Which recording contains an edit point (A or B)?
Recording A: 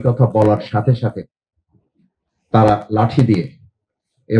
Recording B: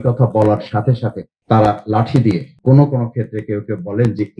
B